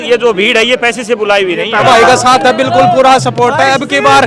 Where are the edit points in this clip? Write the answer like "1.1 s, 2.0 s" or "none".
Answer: 1.8 s